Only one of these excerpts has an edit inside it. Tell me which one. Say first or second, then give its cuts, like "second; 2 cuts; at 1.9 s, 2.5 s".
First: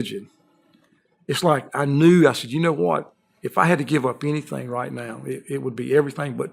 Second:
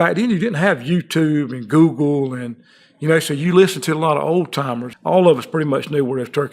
second; 1 cut; at 4.9 s